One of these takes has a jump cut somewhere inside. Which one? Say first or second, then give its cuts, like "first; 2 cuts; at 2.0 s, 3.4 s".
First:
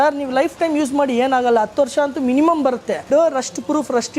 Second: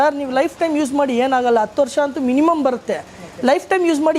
first; 1 cut; at 3.1 s